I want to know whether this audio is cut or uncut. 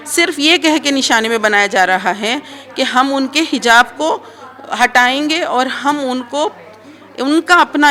uncut